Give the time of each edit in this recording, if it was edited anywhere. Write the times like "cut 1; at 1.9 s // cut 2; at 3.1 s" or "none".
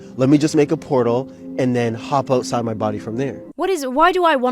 cut 1; at 3.4 s